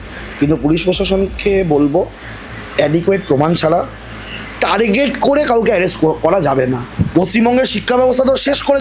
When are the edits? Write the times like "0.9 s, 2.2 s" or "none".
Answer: 7.0 s